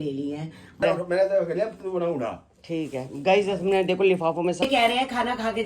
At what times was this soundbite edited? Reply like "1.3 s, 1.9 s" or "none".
0.8 s, 4.6 s